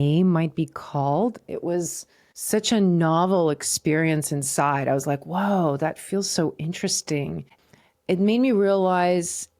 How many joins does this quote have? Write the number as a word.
one